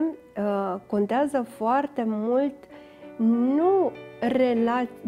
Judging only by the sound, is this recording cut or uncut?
uncut